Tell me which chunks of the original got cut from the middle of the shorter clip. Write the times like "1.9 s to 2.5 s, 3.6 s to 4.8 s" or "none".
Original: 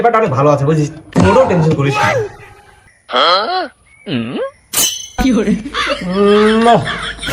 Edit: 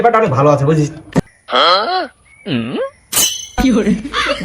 1.2 s to 2.8 s